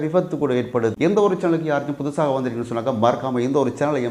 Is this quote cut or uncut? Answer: cut